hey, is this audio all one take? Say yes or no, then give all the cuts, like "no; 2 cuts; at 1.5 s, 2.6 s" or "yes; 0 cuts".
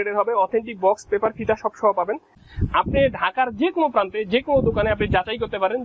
no; 1 cut; at 2.4 s